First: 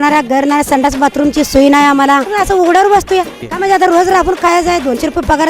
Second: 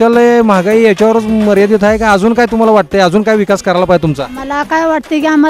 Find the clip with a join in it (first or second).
first